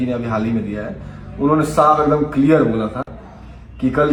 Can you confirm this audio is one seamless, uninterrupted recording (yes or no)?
yes